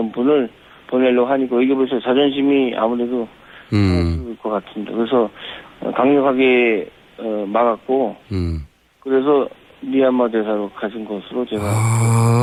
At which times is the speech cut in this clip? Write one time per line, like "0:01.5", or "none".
none